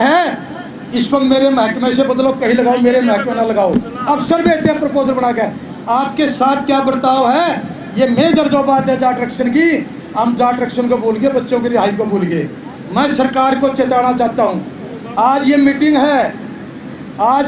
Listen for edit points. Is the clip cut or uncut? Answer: uncut